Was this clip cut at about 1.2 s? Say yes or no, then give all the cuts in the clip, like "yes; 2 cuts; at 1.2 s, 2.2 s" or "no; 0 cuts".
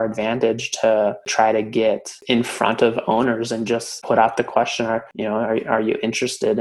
yes; 4 cuts; at 1.2 s, 2.1 s, 3.9 s, 5.1 s